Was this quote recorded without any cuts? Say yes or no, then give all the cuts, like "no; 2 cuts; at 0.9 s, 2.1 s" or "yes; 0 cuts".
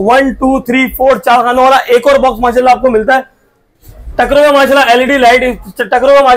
yes; 0 cuts